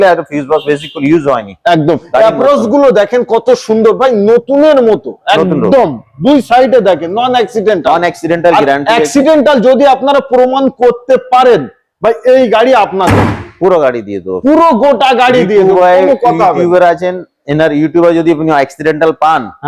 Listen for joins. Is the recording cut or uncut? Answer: uncut